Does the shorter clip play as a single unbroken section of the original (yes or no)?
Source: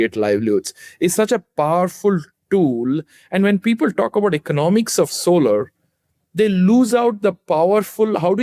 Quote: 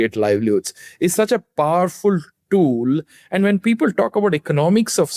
yes